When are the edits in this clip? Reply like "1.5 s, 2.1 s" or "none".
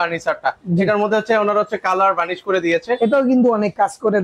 3.0 s